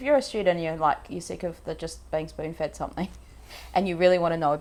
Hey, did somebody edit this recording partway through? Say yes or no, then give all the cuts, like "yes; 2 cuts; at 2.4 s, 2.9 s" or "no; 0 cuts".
no; 0 cuts